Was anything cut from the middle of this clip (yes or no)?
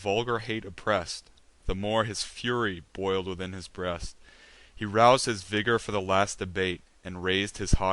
yes